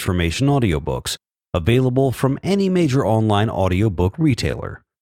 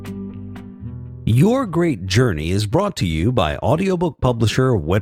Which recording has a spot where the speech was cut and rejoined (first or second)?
second